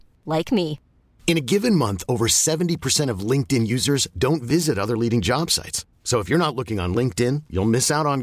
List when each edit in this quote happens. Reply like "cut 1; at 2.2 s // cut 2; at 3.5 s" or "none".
none